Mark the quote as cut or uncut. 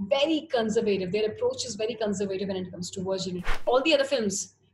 cut